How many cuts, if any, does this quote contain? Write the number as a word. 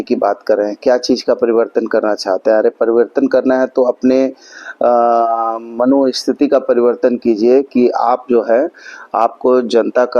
zero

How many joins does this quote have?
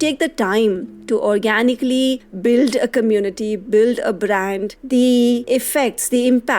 four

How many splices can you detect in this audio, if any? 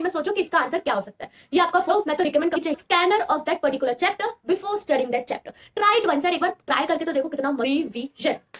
three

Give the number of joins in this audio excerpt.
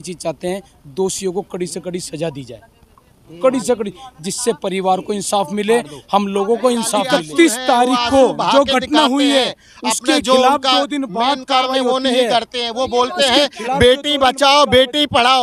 one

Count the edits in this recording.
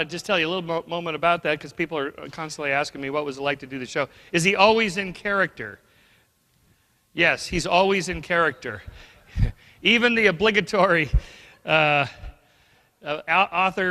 one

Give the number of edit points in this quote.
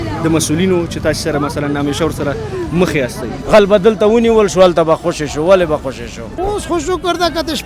two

